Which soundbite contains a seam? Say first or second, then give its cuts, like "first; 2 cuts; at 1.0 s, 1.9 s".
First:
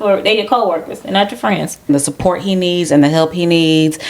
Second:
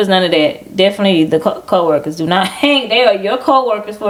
first; 1 cut; at 1.9 s